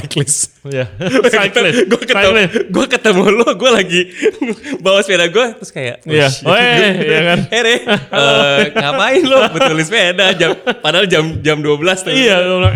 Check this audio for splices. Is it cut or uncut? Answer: uncut